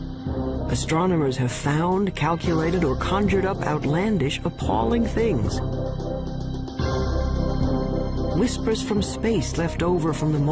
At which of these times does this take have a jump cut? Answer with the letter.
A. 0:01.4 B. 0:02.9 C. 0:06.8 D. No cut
C